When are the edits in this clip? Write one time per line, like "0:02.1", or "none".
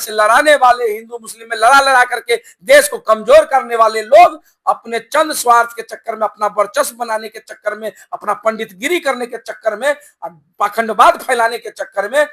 none